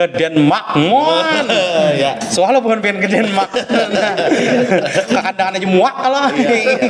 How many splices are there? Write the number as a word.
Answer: zero